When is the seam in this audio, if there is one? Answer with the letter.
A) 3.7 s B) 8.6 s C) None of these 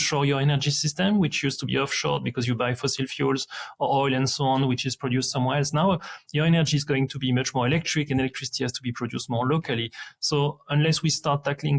C